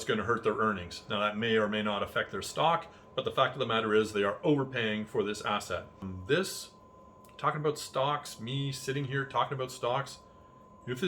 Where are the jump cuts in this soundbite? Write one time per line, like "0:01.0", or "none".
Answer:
0:06.1